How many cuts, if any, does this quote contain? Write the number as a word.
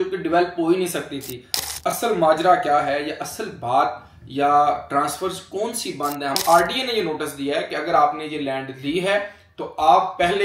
two